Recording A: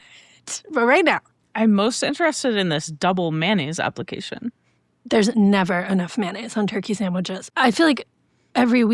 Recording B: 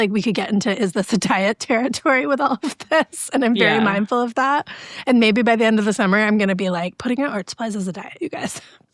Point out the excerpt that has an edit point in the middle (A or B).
A